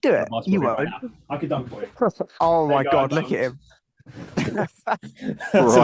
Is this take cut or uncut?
uncut